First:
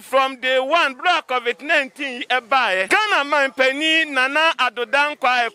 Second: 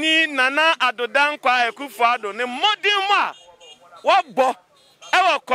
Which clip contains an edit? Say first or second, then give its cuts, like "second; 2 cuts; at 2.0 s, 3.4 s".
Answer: first; 1 cut; at 2.9 s